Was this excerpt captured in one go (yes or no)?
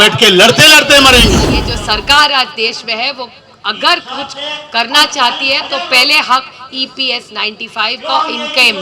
no